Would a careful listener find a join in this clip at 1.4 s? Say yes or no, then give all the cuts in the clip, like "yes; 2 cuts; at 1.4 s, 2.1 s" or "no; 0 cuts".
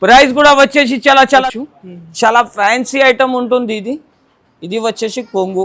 yes; 1 cut; at 1.4 s